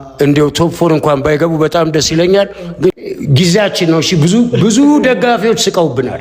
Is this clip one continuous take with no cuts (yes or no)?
no